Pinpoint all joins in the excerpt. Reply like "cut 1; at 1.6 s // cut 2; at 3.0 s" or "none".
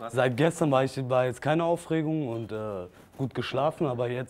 none